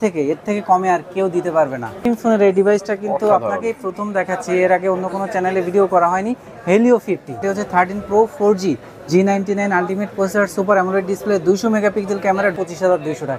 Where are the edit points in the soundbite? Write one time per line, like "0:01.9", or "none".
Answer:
0:02.1
0:07.4
0:12.5